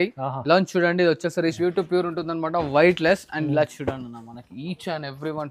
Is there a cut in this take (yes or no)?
yes